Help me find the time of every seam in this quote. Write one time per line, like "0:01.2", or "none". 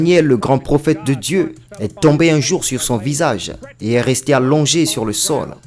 none